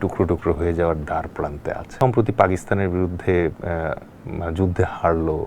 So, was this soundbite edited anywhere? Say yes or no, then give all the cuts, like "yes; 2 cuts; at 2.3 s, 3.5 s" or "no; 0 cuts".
yes; 1 cut; at 1.9 s